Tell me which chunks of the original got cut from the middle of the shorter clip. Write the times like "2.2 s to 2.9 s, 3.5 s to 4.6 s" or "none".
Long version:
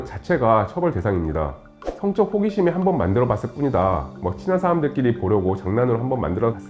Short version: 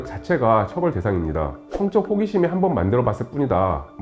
1.6 s to 1.9 s